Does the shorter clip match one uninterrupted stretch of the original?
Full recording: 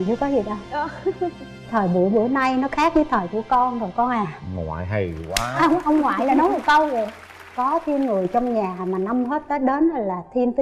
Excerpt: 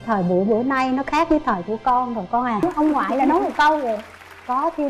no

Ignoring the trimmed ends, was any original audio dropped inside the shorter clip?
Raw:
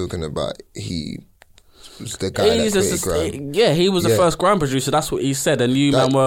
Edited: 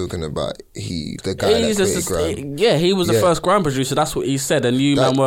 yes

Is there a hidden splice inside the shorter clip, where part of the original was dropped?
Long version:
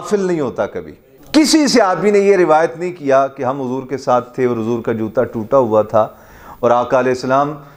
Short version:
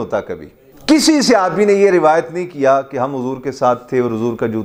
no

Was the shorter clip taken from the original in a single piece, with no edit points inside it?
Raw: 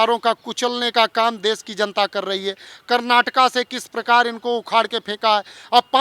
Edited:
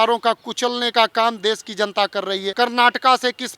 no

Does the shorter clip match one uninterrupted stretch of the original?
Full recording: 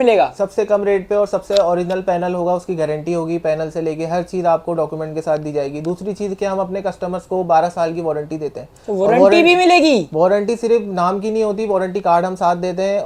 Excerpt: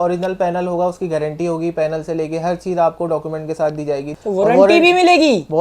no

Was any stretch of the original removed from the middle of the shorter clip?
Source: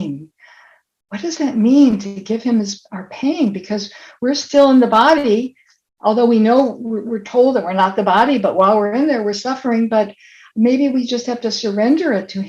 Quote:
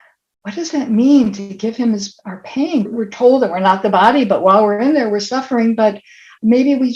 yes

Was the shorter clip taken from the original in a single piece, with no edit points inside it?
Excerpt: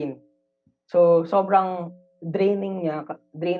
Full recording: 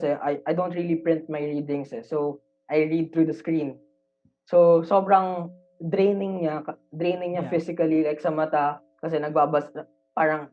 yes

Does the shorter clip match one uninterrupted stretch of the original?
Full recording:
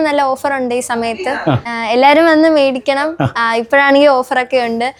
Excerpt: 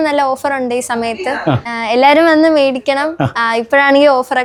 yes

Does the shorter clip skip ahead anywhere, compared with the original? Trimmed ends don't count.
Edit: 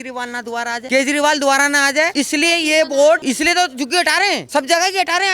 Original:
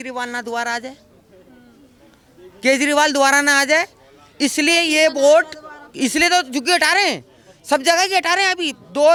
yes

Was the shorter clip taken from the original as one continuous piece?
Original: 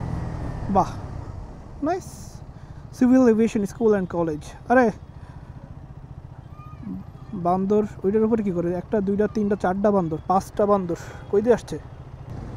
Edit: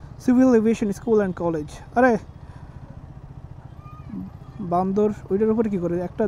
yes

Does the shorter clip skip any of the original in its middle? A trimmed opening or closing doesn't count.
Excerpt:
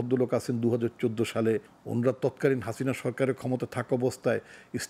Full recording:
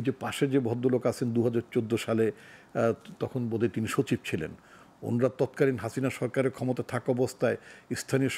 yes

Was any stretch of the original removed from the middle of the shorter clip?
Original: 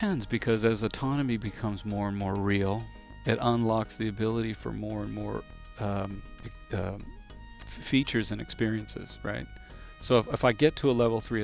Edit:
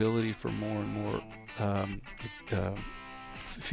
no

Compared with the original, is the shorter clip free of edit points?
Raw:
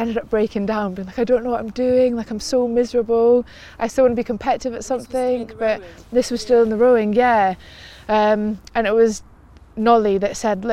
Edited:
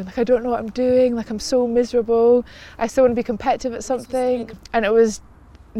no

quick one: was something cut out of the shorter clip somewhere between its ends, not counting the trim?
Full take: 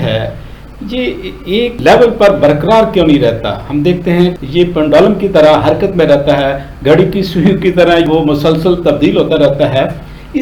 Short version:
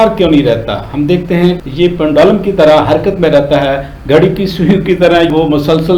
no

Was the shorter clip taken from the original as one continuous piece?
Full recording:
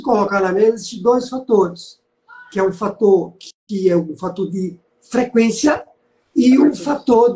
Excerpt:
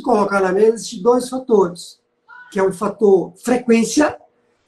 no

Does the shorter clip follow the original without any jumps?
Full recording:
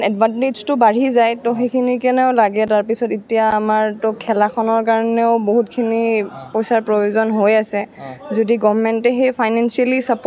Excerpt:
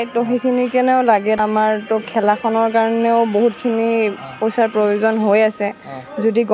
no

